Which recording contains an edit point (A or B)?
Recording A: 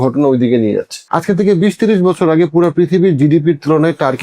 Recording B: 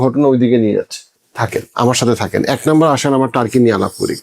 A